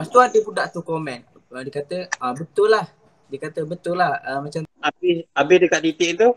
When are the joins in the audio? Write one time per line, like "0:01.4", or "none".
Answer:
0:04.7